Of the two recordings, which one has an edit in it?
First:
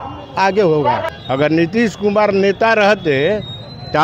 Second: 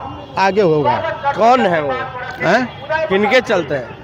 first; 1 cut; at 1.1 s

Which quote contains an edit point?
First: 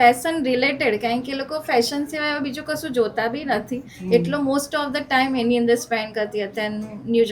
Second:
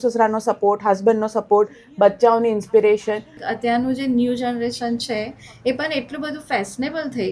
second; 1 cut; at 3.4 s

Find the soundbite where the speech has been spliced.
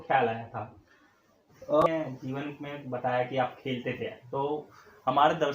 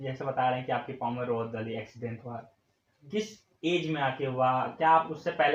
first; 1 cut; at 1.8 s

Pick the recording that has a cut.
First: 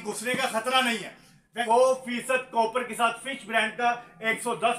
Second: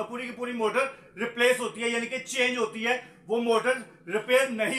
first; 1 cut; at 1.6 s

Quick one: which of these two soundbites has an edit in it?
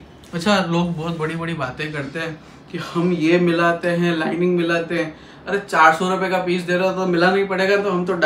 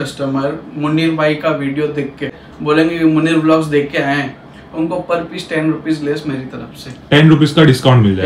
second; 1 cut; at 2.5 s

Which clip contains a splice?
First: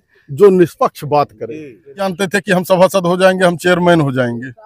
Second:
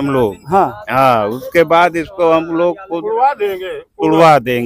first; 1 cut; at 2.1 s

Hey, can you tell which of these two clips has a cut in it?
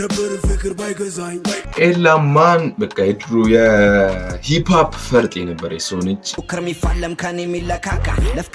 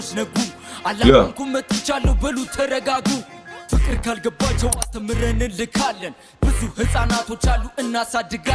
first; 2 cuts; at 1.6 s, 6.4 s

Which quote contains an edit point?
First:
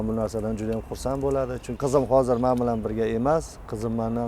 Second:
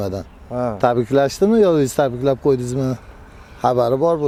first; 1 cut; at 1.8 s

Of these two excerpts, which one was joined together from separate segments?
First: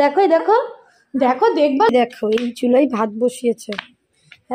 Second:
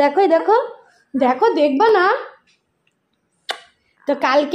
first; 1 cut; at 1.9 s

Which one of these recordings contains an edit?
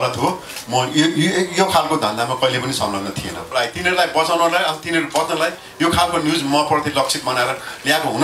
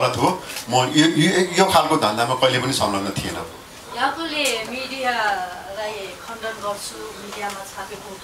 first; 1 cut; at 3.5 s

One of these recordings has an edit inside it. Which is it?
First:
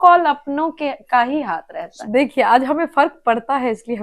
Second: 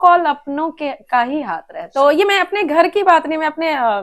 first; 1 cut; at 1.8 s

